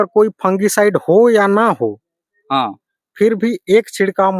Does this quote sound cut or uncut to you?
uncut